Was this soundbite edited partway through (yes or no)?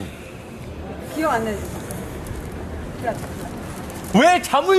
no